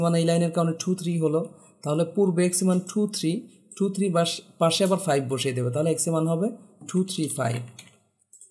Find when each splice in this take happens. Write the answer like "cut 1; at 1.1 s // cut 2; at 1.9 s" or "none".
none

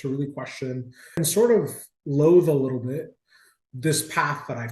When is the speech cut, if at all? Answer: cut 1; at 1.2 s

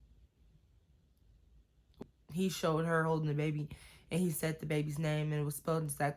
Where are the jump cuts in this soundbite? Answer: cut 1; at 2.0 s

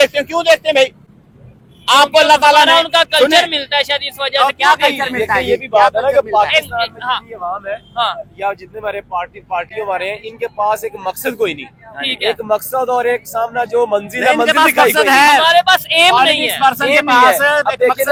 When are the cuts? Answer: none

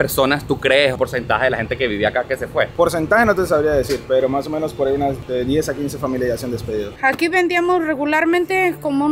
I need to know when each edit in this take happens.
cut 1; at 1.0 s // cut 2; at 2.7 s // cut 3; at 5.2 s // cut 4; at 6.9 s

